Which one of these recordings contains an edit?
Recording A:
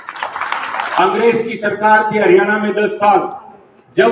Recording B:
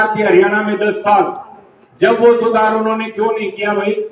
A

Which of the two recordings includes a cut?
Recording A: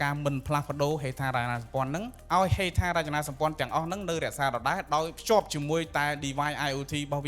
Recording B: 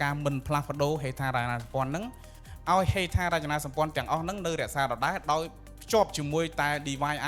A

